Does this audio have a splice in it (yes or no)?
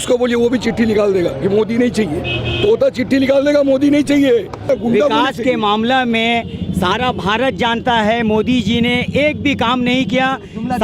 yes